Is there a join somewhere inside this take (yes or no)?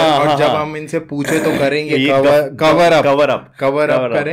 no